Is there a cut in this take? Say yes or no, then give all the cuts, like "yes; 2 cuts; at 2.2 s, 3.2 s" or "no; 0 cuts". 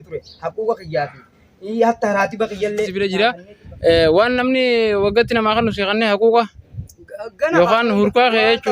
yes; 1 cut; at 2.9 s